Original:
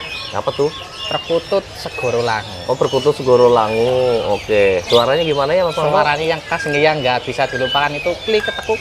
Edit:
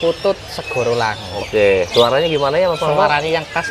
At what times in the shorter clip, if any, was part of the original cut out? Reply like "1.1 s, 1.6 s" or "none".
1.4 s